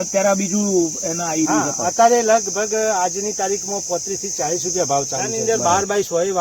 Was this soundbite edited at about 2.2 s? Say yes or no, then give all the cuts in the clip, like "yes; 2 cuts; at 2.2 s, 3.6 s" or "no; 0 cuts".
no; 1 cut; at 5.4 s